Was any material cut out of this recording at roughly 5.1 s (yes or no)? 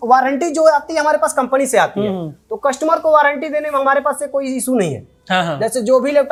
no